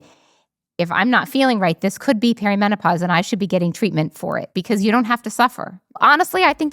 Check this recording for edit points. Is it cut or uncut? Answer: cut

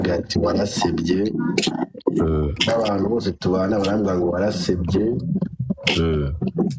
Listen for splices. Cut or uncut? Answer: uncut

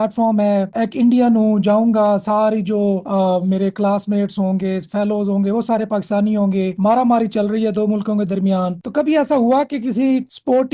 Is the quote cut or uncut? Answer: uncut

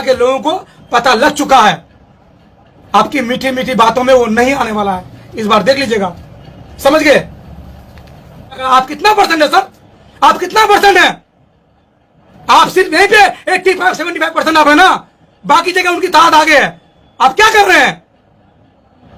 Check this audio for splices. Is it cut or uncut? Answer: cut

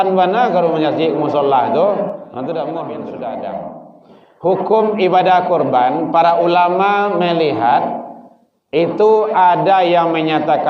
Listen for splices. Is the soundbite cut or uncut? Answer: cut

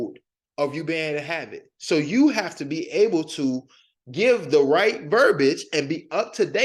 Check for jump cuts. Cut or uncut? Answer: uncut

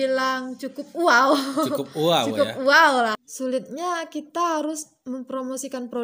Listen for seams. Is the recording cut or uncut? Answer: cut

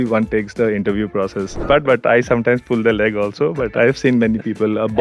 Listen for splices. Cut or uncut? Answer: cut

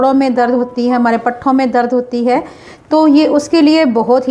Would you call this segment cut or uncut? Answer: uncut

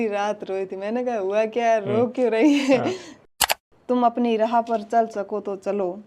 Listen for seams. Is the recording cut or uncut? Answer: cut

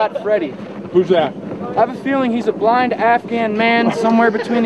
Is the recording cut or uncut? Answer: uncut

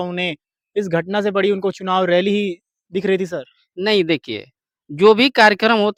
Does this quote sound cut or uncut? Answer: uncut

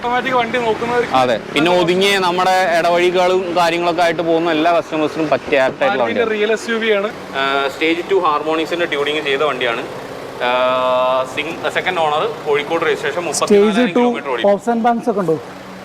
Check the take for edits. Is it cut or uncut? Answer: cut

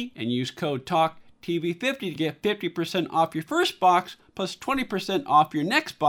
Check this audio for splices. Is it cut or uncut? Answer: uncut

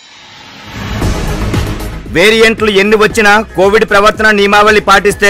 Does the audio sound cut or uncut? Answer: cut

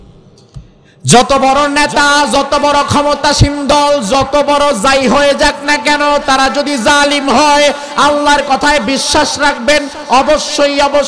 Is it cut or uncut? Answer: uncut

